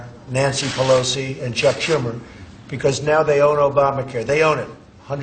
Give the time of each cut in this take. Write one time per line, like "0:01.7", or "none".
none